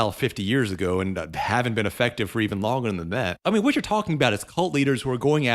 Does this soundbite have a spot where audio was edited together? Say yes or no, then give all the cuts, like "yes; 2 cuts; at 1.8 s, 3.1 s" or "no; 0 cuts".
yes; 1 cut; at 3.4 s